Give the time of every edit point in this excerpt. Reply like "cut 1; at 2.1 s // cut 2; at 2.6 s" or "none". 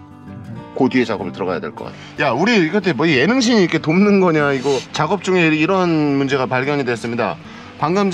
cut 1; at 2.1 s